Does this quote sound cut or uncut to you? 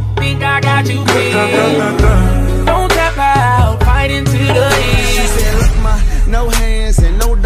uncut